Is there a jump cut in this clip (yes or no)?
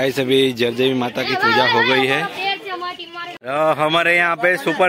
yes